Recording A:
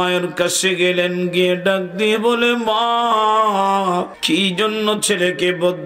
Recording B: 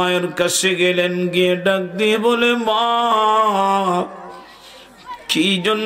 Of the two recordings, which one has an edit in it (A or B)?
A